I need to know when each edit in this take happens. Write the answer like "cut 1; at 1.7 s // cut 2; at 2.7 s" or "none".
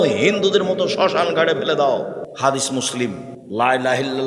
cut 1; at 2.3 s // cut 2; at 3.3 s